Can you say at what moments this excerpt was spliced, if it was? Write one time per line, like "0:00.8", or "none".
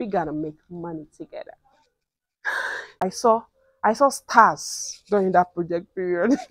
0:03.1